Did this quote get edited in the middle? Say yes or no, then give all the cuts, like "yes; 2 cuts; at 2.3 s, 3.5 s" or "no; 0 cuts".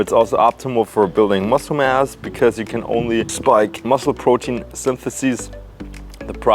no; 0 cuts